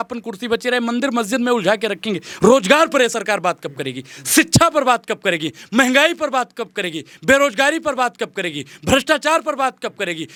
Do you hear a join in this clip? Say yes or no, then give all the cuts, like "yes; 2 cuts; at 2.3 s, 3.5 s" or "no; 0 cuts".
no; 0 cuts